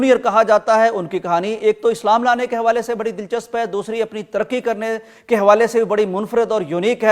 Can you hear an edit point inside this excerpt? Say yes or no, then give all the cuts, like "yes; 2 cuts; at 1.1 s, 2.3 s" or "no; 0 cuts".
no; 0 cuts